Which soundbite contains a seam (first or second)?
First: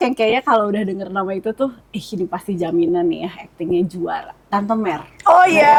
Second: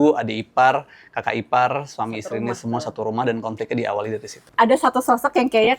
second